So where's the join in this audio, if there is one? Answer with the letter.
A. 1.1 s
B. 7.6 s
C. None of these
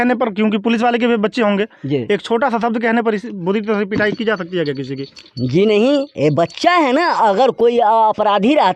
C